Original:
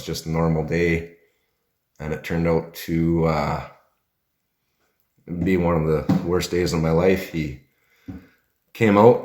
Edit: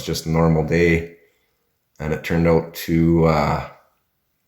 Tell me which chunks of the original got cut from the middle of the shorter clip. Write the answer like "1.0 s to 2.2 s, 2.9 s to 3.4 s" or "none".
none